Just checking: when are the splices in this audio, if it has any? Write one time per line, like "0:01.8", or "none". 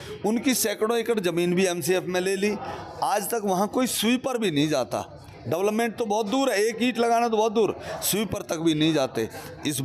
none